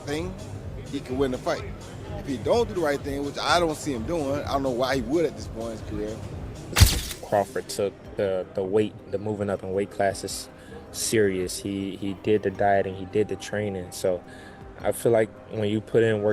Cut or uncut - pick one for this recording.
cut